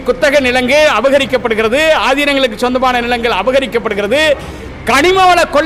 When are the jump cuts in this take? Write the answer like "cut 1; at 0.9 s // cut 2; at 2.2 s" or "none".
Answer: none